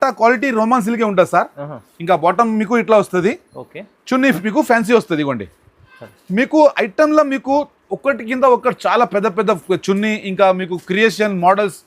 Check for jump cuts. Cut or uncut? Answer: uncut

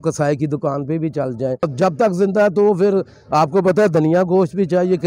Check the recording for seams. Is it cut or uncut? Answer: cut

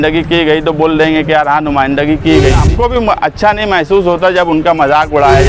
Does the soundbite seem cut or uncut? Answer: cut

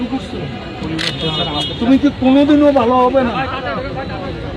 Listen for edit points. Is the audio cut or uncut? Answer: uncut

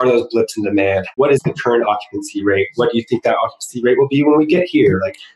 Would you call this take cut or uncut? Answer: cut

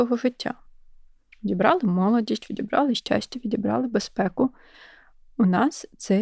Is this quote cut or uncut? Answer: uncut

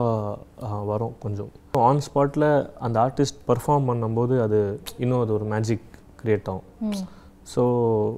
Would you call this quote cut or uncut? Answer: cut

